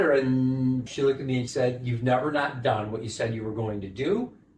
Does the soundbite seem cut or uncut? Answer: cut